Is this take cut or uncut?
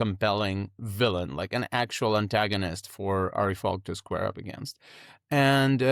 uncut